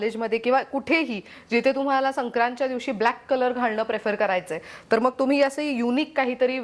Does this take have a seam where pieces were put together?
no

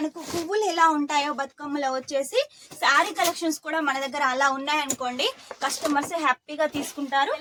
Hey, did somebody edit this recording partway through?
no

